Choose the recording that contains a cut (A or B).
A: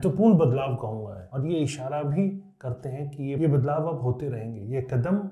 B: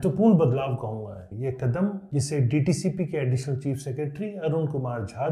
B